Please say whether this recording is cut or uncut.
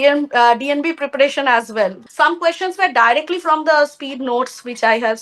cut